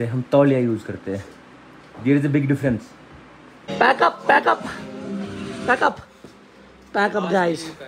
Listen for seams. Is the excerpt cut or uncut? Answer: uncut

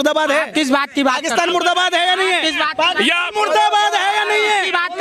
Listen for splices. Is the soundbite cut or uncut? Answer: uncut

